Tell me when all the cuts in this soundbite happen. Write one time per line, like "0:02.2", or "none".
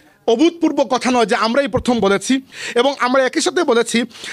0:02.6